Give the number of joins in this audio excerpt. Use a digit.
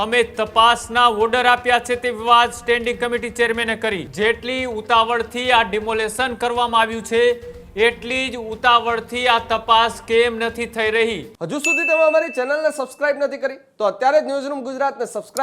2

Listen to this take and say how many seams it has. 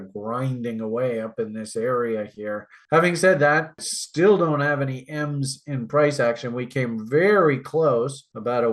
1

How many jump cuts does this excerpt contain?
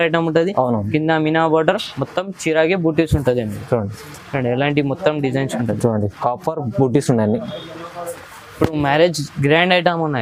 0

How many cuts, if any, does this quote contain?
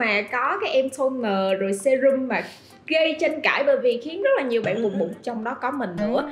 0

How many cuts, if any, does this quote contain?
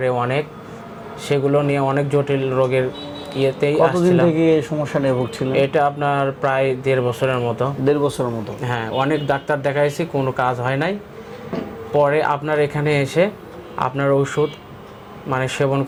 0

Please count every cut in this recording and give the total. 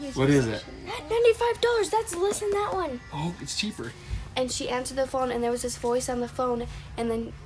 1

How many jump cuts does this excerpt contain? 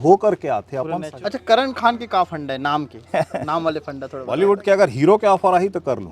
2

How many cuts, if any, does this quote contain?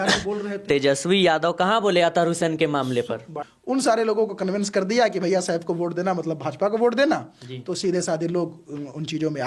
1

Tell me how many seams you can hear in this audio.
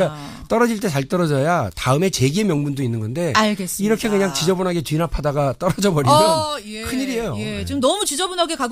1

